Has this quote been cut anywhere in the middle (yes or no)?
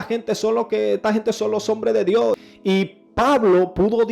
yes